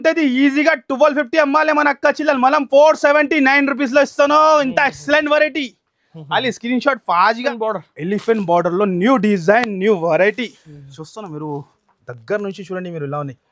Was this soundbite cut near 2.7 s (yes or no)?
no